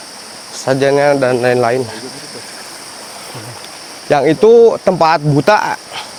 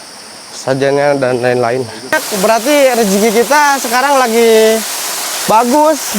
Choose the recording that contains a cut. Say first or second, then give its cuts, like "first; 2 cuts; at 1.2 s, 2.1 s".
second; 1 cut; at 2.3 s